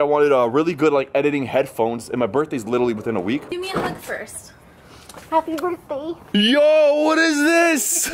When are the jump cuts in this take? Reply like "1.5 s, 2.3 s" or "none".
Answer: 3.5 s, 6.2 s